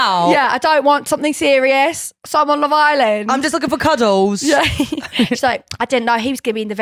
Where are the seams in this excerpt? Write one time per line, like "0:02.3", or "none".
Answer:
none